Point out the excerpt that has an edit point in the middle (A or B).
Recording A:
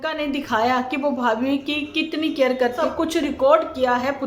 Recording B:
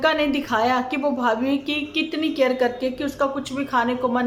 A